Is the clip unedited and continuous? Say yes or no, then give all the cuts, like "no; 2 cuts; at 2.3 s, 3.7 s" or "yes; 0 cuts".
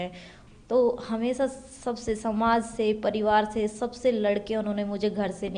yes; 0 cuts